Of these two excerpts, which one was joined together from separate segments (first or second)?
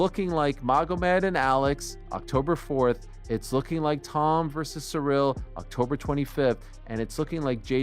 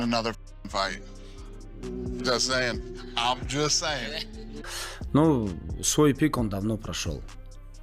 second